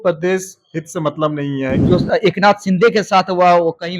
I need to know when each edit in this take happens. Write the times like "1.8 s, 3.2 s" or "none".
1.8 s